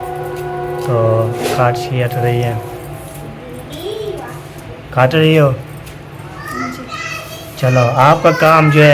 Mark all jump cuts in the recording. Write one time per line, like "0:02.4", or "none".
none